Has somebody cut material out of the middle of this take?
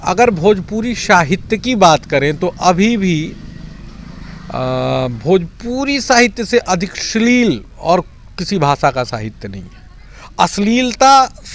no; 0 cuts

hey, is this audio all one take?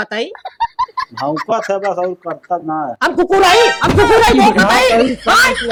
yes; 0 cuts

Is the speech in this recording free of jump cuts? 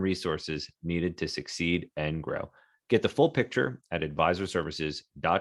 yes; 0 cuts

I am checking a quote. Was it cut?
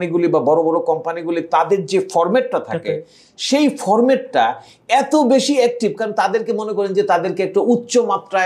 no; 0 cuts

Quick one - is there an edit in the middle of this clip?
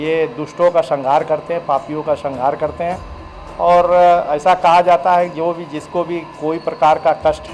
no; 0 cuts

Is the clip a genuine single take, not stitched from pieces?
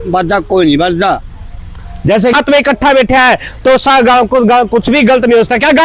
no; 1 cut; at 2.3 s

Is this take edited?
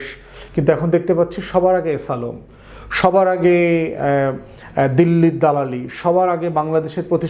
no; 0 cuts

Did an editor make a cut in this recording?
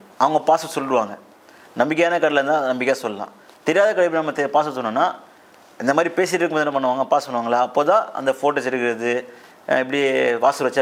no; 0 cuts

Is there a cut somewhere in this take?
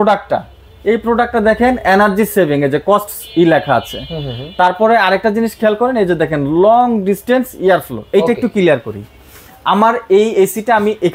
no; 0 cuts

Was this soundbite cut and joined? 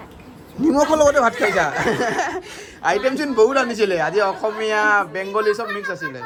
no; 0 cuts

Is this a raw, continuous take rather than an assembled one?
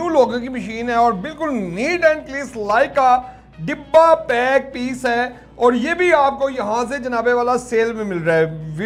yes; 0 cuts

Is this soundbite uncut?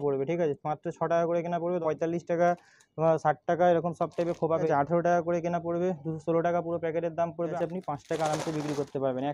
no; 3 cuts; at 1.8 s, 4.7 s, 7.5 s

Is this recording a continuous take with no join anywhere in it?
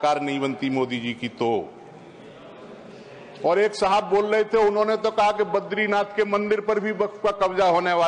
yes; 0 cuts

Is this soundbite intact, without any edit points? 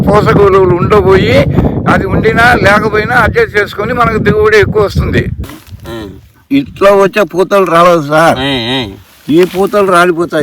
no; 1 cut; at 5.4 s

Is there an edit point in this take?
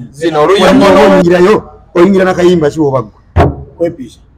yes; 1 cut; at 1.2 s

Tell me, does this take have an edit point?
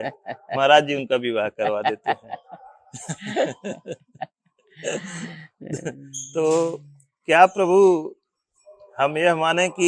no; 0 cuts

